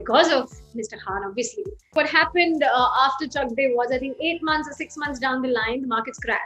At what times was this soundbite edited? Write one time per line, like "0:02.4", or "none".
0:01.9